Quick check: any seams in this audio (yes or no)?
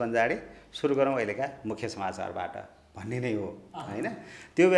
no